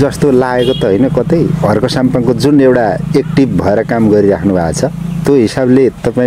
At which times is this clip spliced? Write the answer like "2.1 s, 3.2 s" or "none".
none